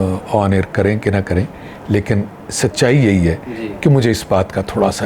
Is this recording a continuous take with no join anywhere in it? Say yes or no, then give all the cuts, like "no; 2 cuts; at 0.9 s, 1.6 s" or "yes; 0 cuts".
yes; 0 cuts